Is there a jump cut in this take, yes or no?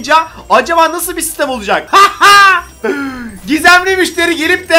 yes